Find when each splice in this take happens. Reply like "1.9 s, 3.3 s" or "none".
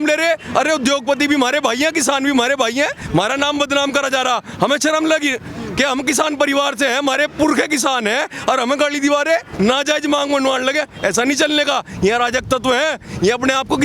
3.0 s, 9.5 s